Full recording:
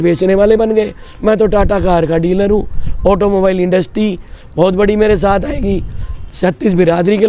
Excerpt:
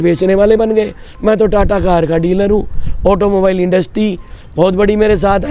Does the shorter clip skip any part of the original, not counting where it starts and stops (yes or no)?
no